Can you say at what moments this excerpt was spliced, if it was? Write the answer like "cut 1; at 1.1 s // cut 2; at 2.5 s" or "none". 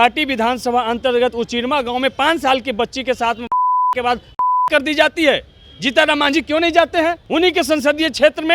cut 1; at 7.2 s

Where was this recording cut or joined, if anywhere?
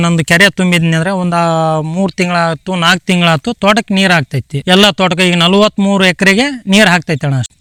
none

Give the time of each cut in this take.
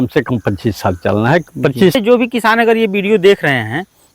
cut 1; at 2.0 s

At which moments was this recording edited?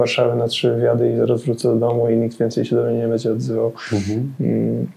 none

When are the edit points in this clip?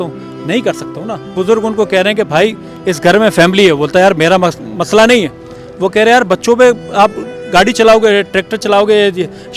cut 1; at 1.3 s

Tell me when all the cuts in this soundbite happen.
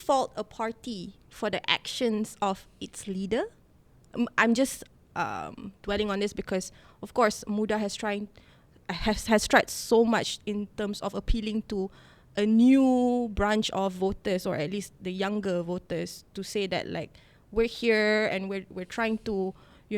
none

